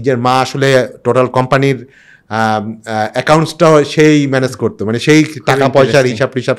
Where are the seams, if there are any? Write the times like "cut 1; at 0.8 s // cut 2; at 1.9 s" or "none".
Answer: none